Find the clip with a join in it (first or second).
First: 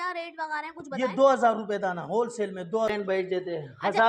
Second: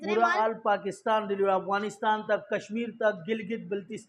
first